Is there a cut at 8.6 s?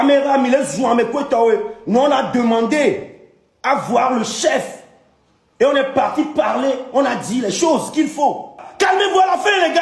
yes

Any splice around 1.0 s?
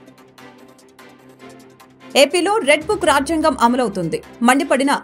yes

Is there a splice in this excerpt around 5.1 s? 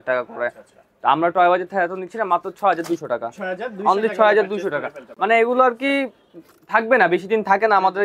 no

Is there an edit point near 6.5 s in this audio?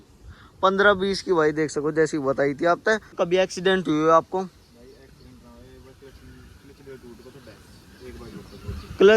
no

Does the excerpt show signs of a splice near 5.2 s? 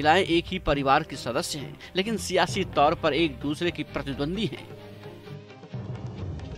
yes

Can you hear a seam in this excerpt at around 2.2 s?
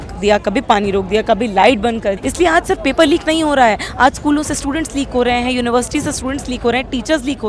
yes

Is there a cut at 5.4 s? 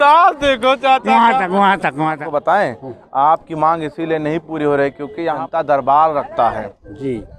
yes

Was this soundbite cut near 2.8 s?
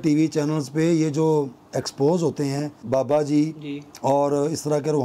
yes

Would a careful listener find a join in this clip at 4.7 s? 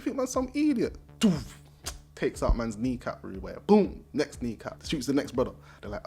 yes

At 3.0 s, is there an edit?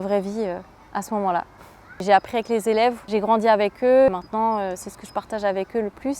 yes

